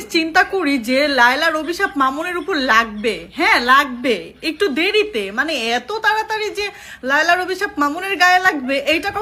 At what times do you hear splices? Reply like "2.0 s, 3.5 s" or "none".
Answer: none